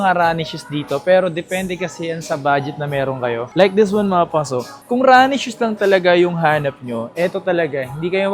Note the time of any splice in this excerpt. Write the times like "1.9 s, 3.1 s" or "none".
none